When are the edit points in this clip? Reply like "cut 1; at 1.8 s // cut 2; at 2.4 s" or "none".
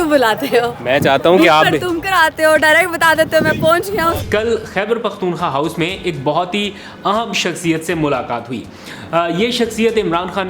cut 1; at 4.2 s